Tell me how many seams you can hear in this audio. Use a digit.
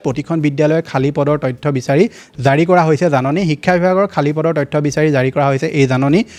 0